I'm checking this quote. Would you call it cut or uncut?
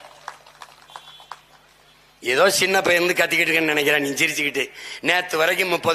uncut